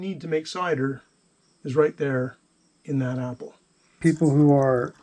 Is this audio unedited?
no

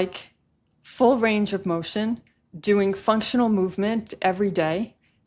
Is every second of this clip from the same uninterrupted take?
yes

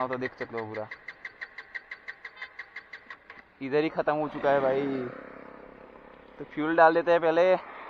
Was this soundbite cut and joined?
no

